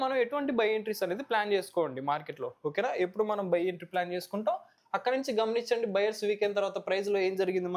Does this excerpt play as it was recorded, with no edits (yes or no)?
no